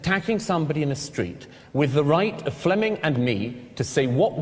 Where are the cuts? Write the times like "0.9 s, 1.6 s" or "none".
none